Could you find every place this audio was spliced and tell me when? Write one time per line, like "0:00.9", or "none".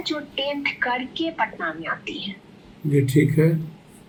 none